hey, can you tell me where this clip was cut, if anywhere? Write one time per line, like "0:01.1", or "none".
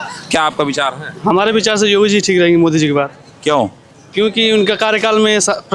none